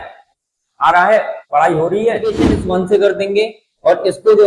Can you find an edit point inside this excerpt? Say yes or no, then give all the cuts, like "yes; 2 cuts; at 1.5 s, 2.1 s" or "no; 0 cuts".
yes; 1 cut; at 2.5 s